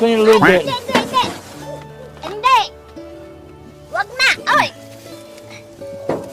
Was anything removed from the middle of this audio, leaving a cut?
no; 0 cuts

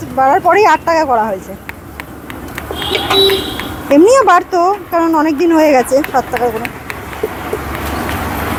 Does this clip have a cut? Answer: no; 0 cuts

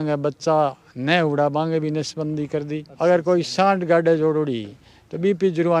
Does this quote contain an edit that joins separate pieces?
yes; 1 cut; at 2.8 s

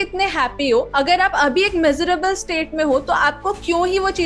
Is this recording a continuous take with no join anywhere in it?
yes; 0 cuts

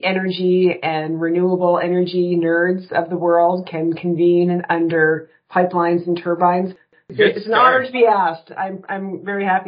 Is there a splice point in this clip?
yes; 1 cut; at 6.8 s

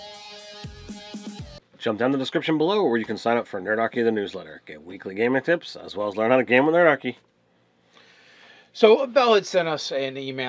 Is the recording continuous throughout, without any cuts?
no; 1 cut; at 1.5 s

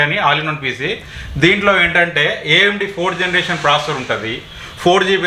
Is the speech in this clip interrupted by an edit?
no; 0 cuts

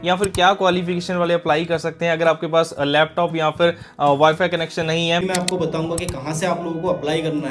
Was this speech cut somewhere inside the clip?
yes; 1 cut; at 5.2 s

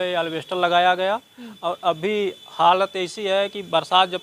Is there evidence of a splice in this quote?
no; 0 cuts

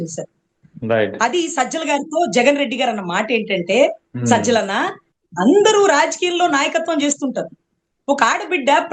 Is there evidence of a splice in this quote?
no; 0 cuts

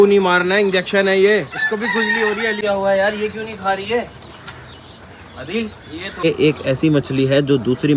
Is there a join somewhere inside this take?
yes; 2 cuts; at 2.6 s, 6.2 s

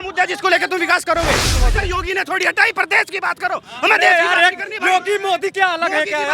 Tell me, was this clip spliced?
yes; 1 cut; at 1.6 s

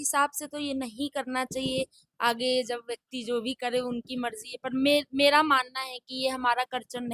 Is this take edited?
no; 0 cuts

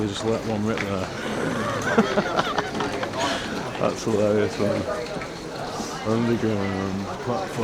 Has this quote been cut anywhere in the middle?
no; 0 cuts

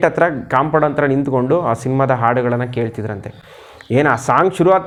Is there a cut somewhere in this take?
no; 0 cuts

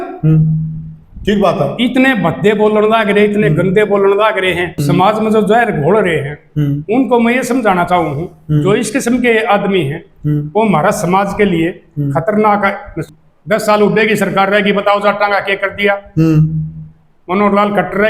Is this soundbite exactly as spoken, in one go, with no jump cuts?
no; 2 cuts; at 4.7 s, 13.0 s

